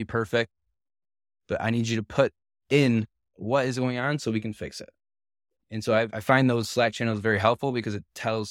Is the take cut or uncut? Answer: cut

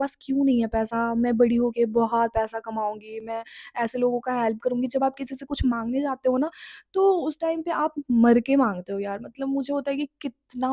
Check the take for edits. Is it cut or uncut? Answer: uncut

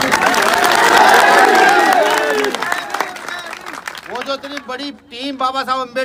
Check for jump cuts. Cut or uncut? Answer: uncut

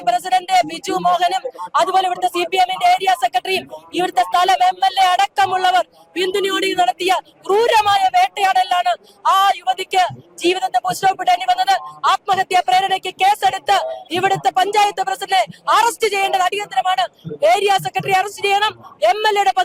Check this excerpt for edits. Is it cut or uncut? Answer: uncut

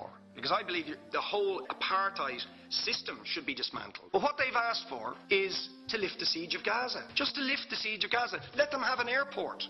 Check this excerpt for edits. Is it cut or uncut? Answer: cut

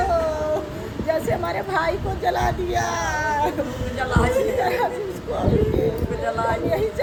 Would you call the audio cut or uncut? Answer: uncut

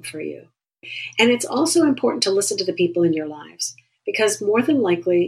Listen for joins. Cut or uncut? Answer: cut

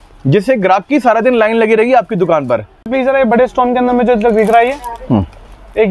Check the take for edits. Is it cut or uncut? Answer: cut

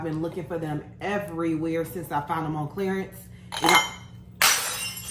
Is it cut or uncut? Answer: uncut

